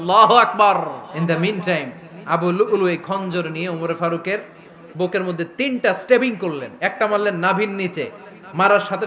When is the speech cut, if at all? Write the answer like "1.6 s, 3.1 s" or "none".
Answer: 1.1 s